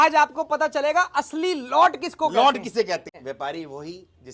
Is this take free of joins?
no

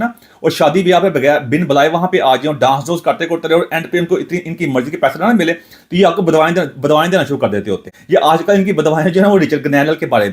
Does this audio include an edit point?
yes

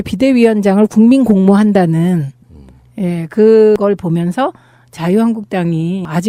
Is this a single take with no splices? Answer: yes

